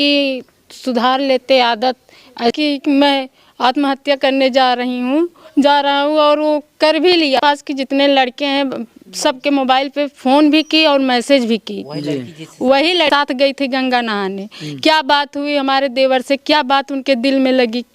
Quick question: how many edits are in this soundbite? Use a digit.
3